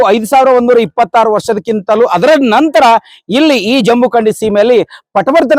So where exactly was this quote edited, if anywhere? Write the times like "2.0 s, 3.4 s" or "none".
none